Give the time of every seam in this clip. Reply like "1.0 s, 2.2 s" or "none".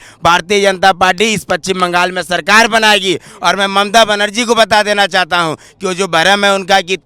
none